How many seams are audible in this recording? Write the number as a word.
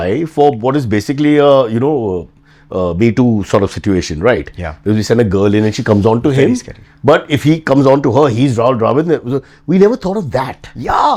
zero